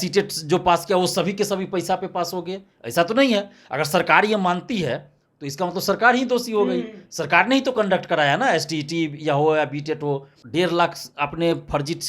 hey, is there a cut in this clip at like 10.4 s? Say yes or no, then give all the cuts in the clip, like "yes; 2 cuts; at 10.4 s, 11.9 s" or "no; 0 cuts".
yes; 1 cut; at 10.4 s